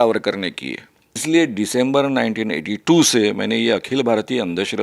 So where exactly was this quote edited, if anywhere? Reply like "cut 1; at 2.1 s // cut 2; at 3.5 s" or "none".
cut 1; at 1.2 s